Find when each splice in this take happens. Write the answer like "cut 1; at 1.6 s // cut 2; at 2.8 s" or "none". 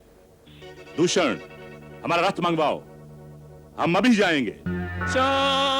cut 1; at 4.8 s